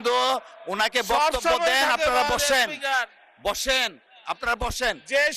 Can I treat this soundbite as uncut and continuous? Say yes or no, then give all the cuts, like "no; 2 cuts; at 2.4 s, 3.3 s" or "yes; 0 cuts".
yes; 0 cuts